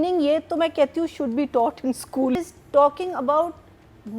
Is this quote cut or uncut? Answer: cut